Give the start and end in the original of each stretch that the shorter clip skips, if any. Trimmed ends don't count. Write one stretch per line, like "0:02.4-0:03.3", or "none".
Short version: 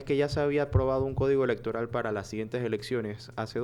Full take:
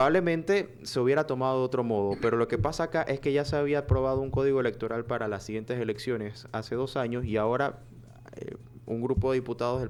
none